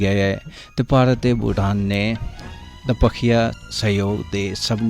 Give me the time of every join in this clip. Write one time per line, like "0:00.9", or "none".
0:03.7